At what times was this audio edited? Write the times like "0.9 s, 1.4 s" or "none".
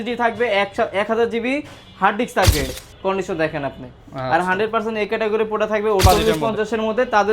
2.7 s, 6.0 s